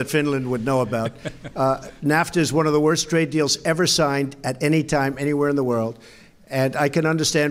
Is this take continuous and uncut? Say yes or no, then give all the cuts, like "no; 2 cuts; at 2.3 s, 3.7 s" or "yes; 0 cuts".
no; 1 cut; at 6.3 s